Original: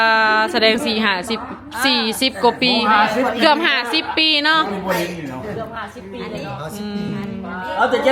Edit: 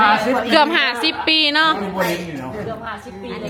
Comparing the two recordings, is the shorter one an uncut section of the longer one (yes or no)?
yes